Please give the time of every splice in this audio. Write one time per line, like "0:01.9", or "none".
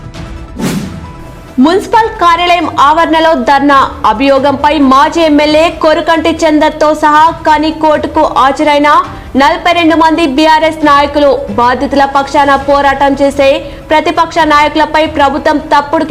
0:01.0